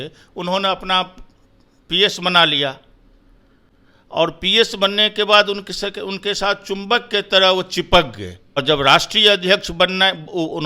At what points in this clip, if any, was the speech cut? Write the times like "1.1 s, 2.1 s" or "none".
8.5 s